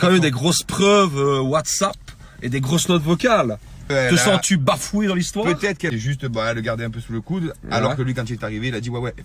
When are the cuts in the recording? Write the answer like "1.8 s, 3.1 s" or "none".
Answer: 3.9 s, 5.9 s